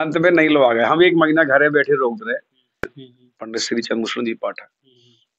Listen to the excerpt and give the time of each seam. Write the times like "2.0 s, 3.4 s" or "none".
2.9 s